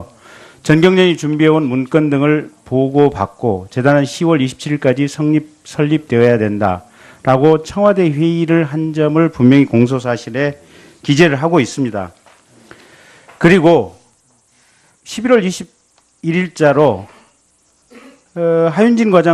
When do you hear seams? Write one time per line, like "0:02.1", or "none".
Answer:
none